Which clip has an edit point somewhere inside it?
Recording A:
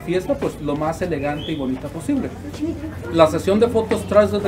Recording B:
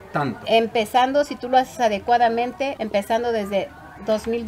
B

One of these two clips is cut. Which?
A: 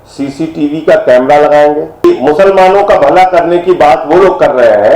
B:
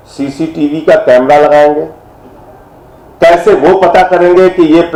A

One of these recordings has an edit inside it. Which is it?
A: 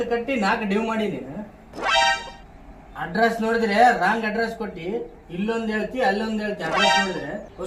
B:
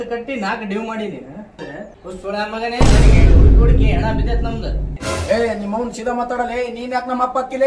B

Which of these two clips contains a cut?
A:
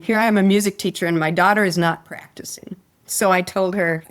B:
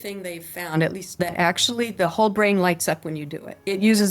B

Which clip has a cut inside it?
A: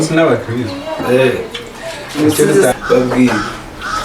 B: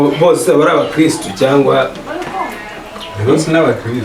A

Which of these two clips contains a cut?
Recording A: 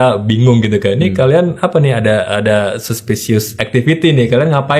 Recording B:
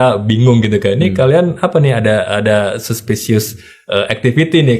A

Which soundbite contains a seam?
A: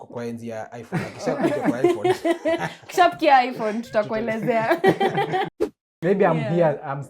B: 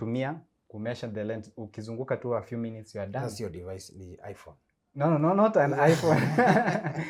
A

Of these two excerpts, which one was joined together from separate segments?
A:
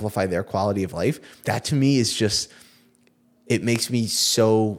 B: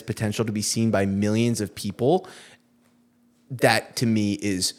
A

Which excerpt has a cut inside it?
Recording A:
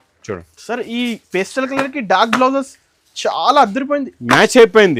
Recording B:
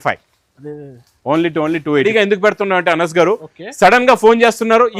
B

